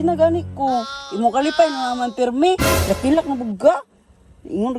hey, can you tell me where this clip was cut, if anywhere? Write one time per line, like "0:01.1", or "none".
0:01.0
0:02.7